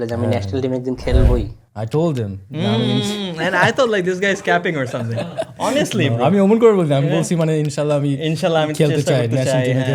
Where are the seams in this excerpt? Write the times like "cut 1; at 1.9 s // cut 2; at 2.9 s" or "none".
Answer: none